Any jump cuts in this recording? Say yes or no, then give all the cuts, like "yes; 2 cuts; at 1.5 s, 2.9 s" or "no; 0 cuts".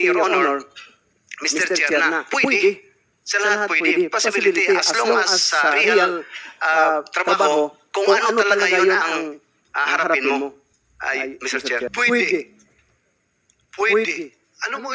yes; 1 cut; at 12.0 s